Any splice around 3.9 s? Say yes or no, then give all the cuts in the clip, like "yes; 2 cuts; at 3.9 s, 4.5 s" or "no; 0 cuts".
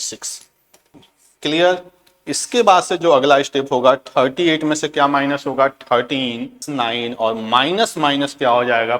no; 2 cuts; at 0.9 s, 6.7 s